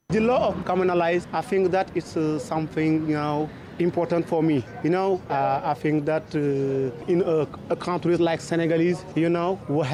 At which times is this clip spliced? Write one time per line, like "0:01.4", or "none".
none

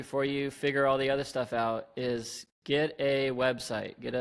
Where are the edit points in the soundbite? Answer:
none

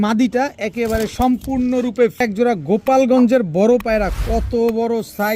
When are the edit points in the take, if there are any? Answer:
0:02.2

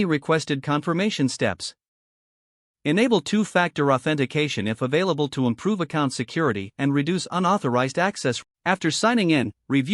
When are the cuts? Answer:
0:08.4

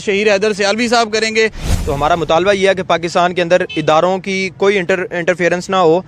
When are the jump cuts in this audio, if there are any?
0:01.7

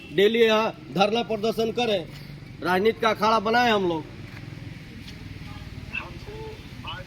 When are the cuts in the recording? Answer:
none

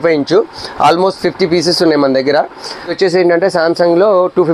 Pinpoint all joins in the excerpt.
0:02.9

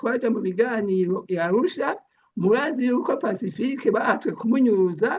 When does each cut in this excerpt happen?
none

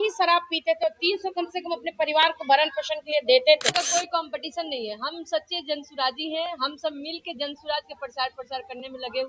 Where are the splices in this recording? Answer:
0:03.7

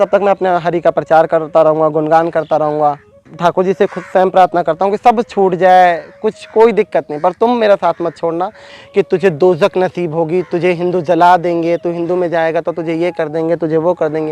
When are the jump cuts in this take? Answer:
0:03.3
0:08.7

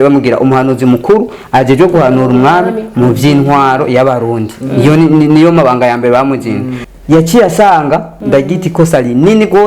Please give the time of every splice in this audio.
0:06.7
0:08.2

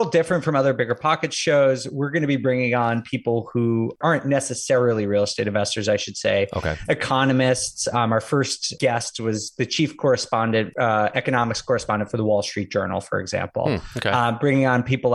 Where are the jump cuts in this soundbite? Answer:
0:04.0
0:08.8
0:10.7

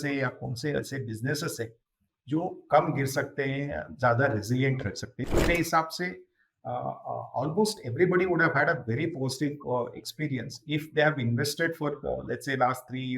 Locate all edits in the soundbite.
0:05.3

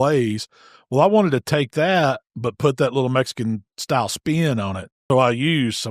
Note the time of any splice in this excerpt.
0:04.9

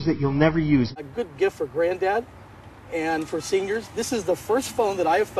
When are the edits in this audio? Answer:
0:01.0

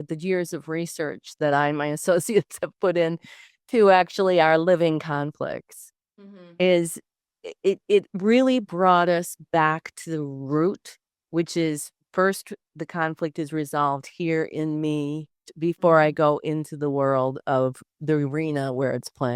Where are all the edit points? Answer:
0:15.5

